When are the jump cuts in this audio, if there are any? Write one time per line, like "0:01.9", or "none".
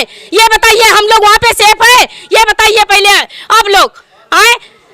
none

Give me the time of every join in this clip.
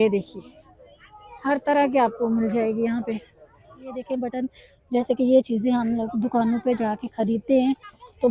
0:04.0

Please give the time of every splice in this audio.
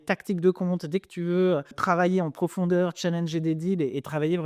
0:01.8

